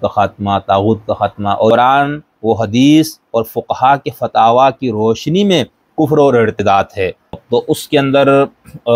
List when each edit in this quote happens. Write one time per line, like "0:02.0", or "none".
0:01.7
0:07.4